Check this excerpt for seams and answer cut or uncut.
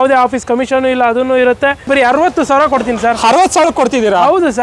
cut